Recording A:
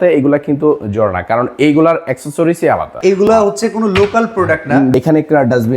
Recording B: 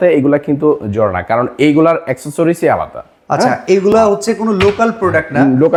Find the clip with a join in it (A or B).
A